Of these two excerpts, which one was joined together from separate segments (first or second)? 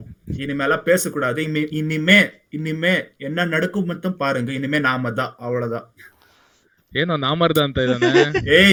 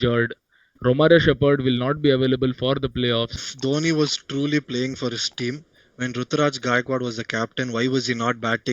second